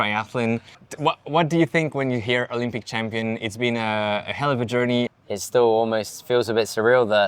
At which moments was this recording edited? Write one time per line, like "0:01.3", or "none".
0:05.2